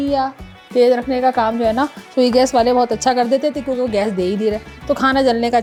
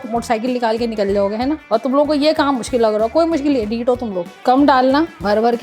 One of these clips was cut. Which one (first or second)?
second